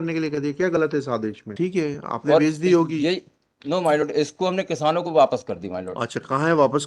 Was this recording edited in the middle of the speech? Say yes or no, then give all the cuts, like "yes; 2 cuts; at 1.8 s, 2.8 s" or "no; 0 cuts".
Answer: yes; 1 cut; at 1.5 s